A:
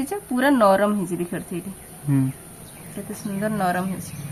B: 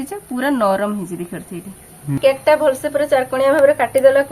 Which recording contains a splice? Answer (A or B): B